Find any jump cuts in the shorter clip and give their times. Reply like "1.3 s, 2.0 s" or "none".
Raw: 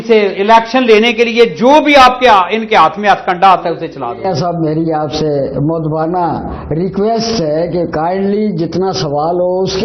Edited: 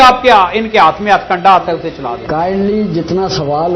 2.2 s

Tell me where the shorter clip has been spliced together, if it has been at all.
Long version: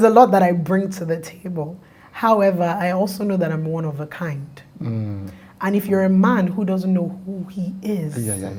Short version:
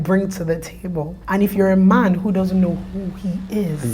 1.1 s

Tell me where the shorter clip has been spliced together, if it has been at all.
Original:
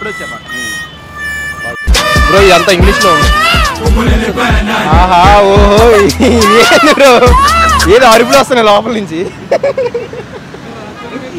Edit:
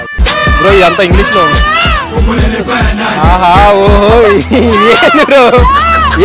none

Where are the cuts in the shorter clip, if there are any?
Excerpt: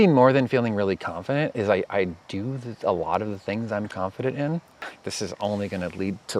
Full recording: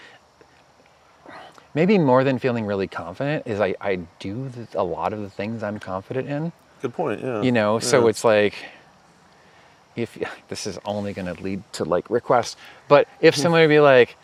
4.9 s

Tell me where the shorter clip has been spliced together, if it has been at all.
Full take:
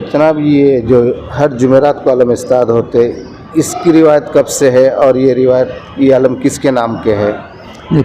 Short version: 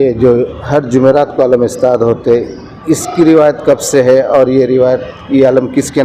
none

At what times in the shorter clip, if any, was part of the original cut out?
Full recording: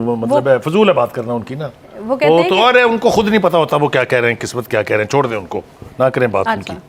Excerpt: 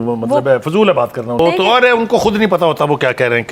1.4 s

